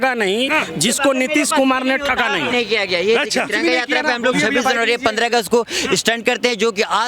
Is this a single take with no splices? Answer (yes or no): no